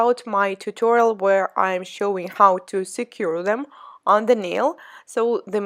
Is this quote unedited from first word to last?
yes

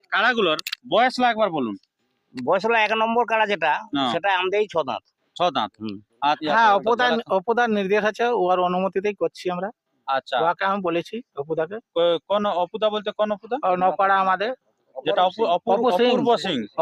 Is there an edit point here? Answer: yes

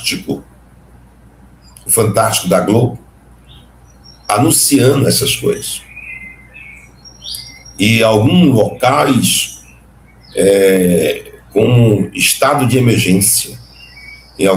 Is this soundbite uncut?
yes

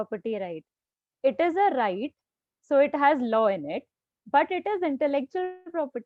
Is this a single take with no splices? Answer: yes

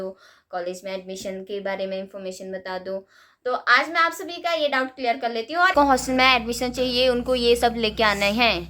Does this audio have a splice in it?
yes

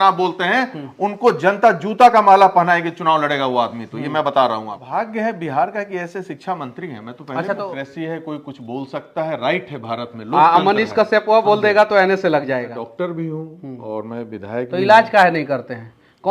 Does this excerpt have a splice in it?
yes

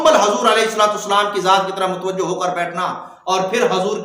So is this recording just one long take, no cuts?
yes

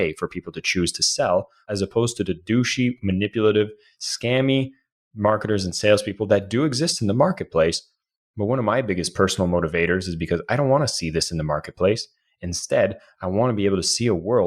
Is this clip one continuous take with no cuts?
no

